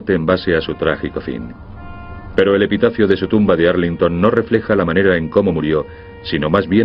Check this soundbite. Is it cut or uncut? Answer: uncut